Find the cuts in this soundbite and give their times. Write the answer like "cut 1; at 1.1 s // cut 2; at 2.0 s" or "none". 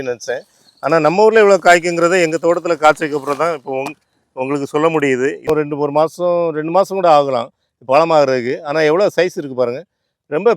cut 1; at 5.5 s